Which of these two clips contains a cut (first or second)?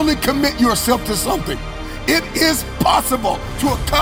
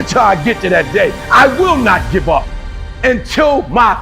second